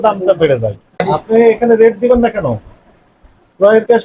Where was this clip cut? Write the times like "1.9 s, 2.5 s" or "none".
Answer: 0.9 s

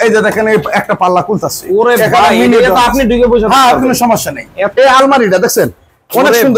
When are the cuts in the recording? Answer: 4.8 s

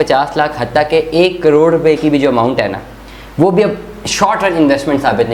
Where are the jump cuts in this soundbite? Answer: none

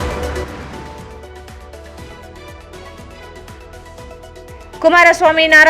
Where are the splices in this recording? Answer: 1.2 s

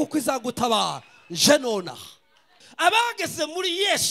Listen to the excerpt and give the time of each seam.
2.6 s

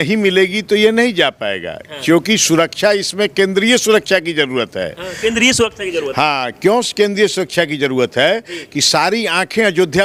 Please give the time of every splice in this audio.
none

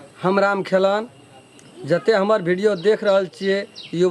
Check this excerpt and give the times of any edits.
none

